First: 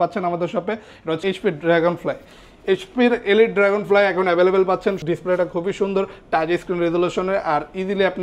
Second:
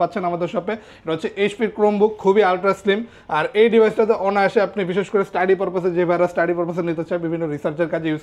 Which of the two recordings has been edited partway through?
first; 2 cuts; at 1.2 s, 5.0 s

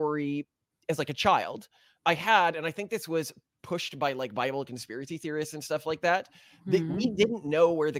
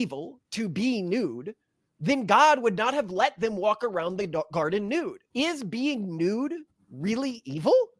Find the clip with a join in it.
second; 1 cut; at 5.2 s

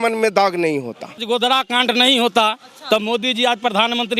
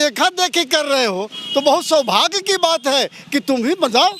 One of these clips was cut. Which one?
first; 1 cut; at 1.2 s

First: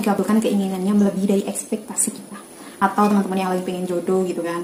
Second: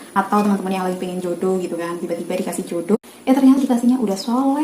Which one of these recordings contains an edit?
second; 1 cut; at 3.0 s

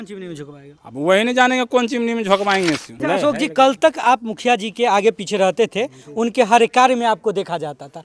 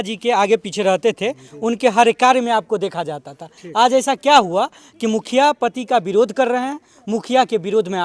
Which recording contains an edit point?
first; 1 cut; at 3.0 s

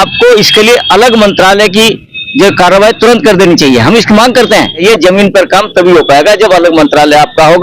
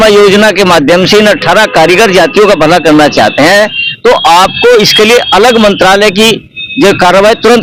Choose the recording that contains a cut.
first; 1 cut; at 4.8 s

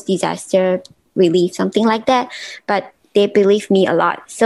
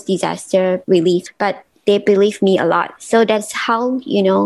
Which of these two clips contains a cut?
second; 1 cut; at 1.1 s

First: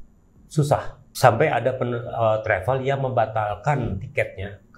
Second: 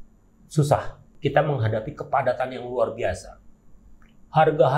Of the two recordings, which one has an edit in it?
second; 1 cut; at 1.0 s

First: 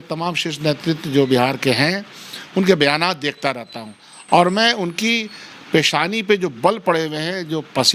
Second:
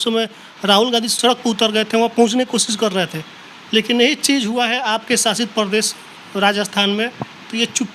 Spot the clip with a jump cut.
second; 1 cut; at 1.1 s

